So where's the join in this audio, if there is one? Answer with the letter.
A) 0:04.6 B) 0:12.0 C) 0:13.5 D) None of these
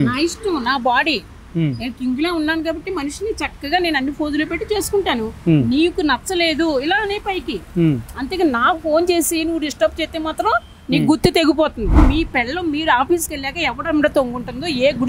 B